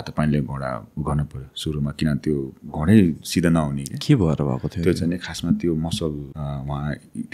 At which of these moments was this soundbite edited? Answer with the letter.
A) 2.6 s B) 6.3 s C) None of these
B